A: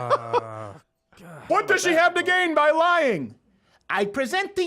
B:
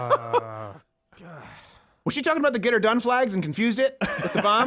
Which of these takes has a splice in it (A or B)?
A